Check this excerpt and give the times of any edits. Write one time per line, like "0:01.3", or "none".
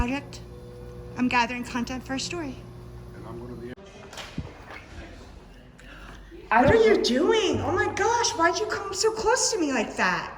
0:03.7